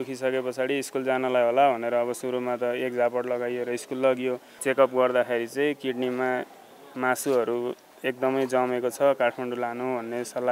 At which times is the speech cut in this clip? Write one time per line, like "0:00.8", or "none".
0:04.5